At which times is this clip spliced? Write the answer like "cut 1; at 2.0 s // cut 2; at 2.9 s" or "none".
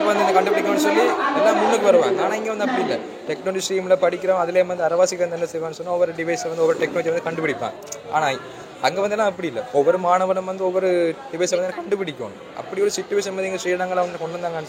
none